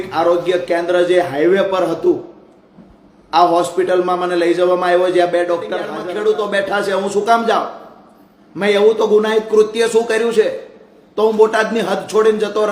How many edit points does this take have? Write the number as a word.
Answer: one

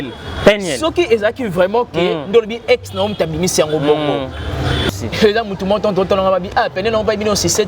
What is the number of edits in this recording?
one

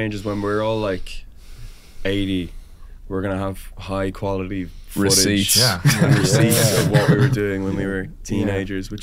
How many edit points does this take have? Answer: zero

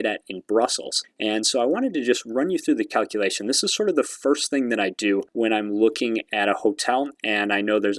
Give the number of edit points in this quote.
one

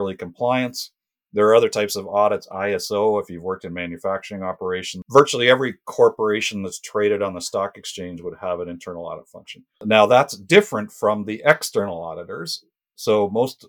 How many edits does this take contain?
two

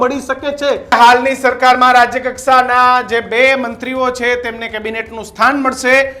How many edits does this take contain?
one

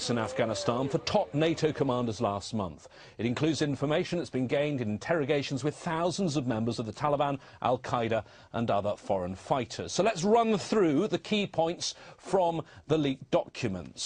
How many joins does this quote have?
one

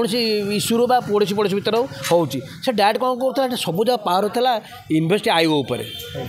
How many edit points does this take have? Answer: zero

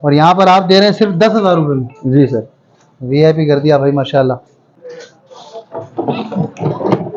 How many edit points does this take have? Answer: one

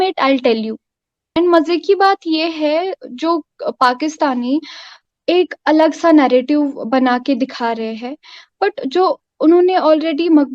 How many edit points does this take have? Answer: one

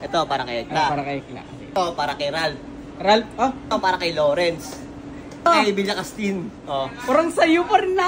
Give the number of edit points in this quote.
three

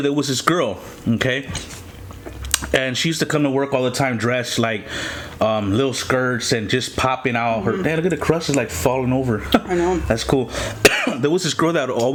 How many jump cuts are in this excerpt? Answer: zero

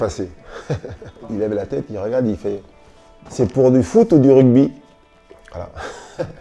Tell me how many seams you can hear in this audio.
one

